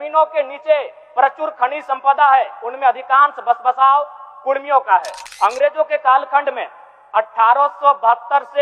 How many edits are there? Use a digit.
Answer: 1